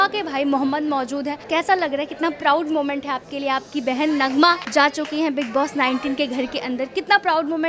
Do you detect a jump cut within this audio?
yes; 2 cuts; at 1.4 s, 4.6 s

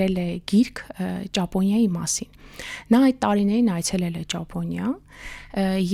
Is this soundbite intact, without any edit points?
yes; 0 cuts

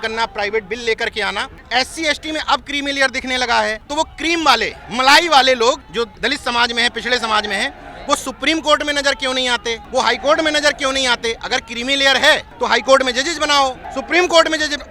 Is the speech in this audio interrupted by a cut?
yes; 7 cuts; at 1.5 s, 3.8 s, 4.8 s, 6.0 s, 9.8 s, 12.5 s, 13.9 s

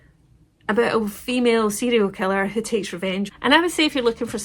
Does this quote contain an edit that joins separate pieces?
yes; 1 cut; at 3.3 s

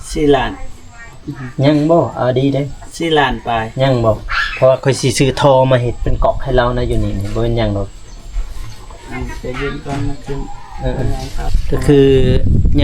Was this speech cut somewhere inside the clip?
yes; 1 cut; at 11.6 s

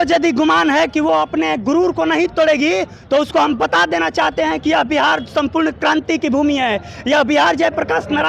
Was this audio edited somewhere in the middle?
no; 0 cuts

